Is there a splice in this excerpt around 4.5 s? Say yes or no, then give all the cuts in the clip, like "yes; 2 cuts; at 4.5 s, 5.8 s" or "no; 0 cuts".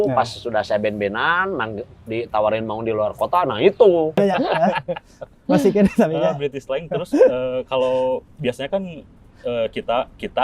yes; 1 cut; at 4.5 s